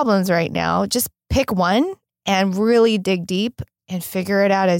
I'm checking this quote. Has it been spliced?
yes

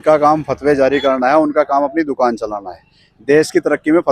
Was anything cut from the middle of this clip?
no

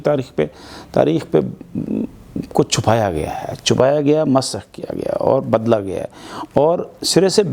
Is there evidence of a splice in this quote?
no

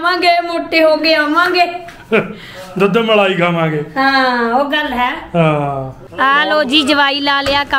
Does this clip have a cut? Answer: yes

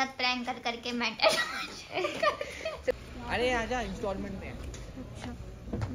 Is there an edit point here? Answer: yes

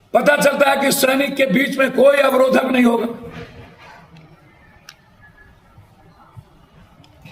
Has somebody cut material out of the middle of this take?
no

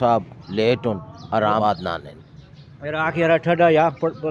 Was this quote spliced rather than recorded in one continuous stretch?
yes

